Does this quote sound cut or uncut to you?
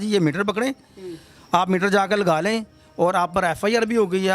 uncut